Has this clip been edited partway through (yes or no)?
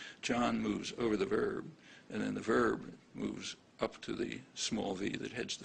no